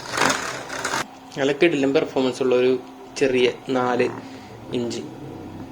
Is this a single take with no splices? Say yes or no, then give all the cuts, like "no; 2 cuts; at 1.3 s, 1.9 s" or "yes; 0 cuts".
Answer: no; 1 cut; at 1.0 s